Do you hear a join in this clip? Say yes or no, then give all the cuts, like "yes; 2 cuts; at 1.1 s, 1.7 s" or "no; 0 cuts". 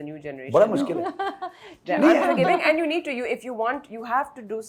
no; 0 cuts